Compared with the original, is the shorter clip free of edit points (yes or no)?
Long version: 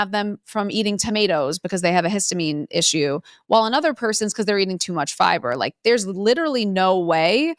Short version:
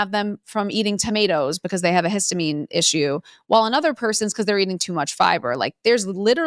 yes